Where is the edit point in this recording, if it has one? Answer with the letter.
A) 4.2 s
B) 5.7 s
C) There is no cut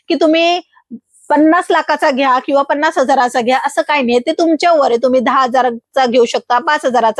C